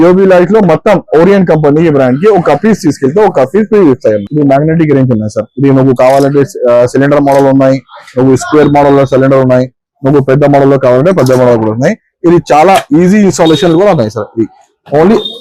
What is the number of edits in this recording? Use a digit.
1